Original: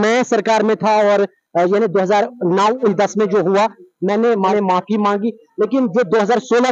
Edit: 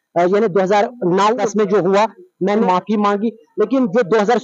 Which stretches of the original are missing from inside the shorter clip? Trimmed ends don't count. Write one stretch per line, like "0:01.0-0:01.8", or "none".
0:02.8-0:03.0
0:04.3-0:04.6